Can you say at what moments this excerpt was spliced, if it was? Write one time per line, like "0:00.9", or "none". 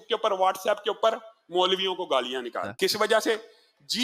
0:02.7